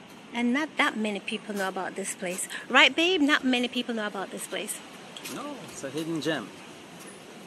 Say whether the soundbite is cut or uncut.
uncut